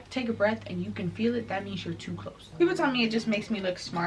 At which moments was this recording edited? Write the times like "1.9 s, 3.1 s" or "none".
2.4 s